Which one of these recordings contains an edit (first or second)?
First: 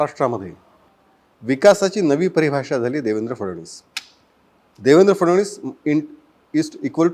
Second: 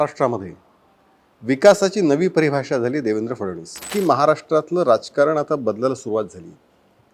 second